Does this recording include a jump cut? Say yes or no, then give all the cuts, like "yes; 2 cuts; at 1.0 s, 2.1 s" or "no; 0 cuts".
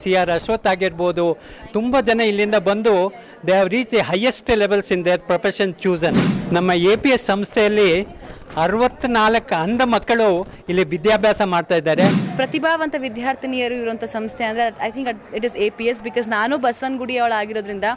yes; 2 cuts; at 6.5 s, 12.2 s